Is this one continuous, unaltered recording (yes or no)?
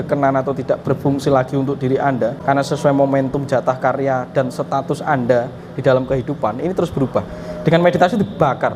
no